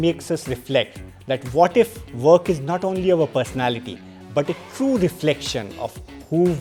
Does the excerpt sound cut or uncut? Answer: uncut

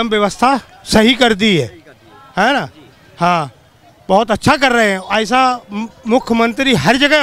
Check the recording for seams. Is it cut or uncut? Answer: uncut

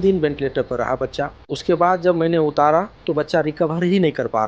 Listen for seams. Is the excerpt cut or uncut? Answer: cut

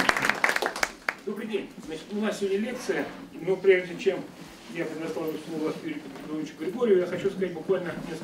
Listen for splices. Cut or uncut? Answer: cut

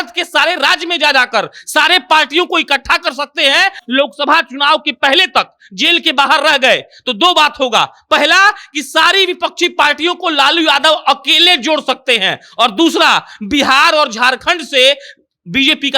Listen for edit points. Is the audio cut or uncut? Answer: cut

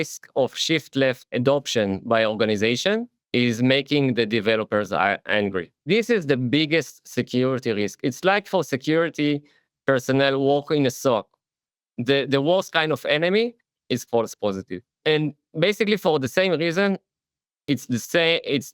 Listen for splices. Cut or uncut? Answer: cut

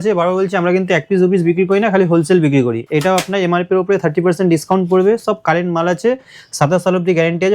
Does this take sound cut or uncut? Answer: cut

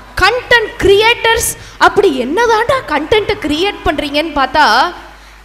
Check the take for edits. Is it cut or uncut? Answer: uncut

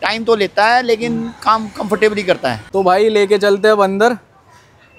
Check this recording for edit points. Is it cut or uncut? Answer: cut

